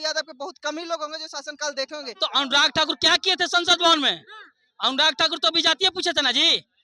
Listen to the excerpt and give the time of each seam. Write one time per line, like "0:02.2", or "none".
0:02.2